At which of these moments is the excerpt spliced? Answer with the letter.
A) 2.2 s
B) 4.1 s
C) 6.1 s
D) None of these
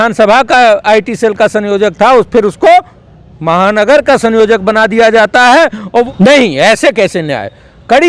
C